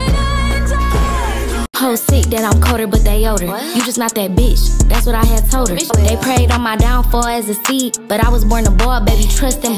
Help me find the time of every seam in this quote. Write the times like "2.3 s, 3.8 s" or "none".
1.7 s